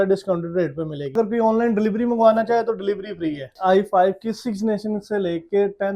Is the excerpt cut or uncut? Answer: cut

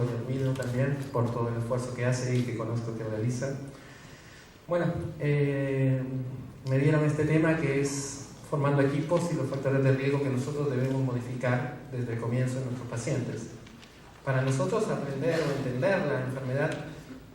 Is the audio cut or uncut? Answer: cut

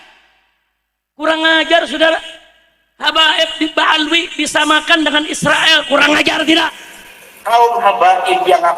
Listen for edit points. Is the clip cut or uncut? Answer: cut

